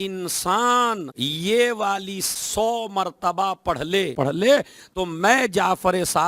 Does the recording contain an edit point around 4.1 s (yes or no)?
yes